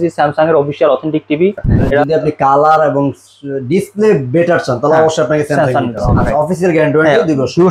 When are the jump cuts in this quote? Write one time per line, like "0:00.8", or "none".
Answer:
0:02.0
0:06.2

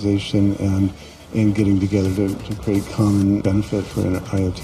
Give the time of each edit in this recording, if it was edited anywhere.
0:03.4

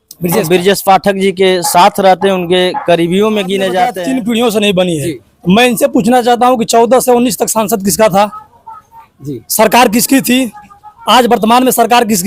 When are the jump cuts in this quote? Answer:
0:03.9

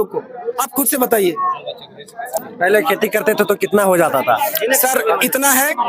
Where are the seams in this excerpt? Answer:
0:02.4

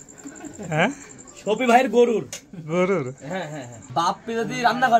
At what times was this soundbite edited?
0:03.8

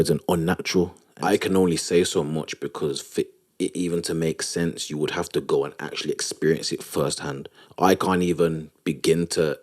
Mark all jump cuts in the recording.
0:01.0

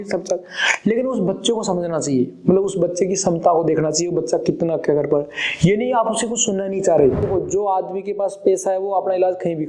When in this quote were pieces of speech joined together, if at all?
0:07.3

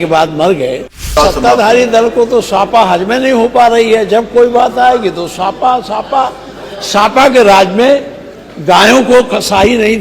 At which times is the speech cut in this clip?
0:01.1

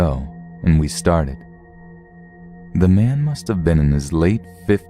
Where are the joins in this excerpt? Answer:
0:03.7

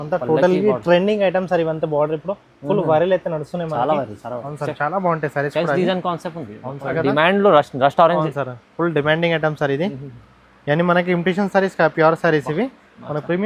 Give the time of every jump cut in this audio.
0:06.9

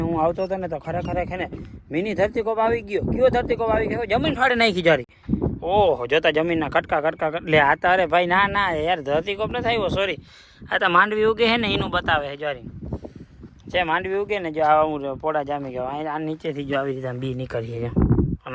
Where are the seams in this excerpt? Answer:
none

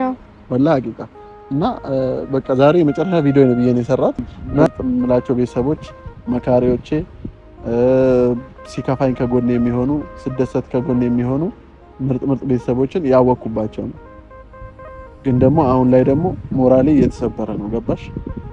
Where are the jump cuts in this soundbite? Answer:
0:04.7

